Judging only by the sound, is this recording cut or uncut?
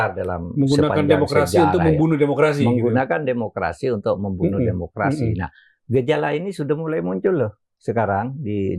uncut